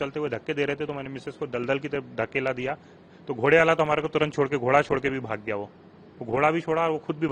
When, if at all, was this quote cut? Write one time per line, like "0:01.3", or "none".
none